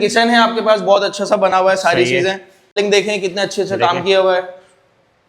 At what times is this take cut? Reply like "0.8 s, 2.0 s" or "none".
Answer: 2.7 s